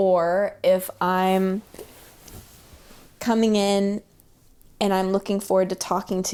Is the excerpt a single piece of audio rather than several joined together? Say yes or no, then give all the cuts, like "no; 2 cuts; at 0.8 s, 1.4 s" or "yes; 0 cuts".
yes; 0 cuts